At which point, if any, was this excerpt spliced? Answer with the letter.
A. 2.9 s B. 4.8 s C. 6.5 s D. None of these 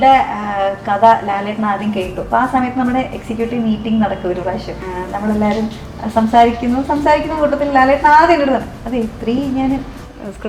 B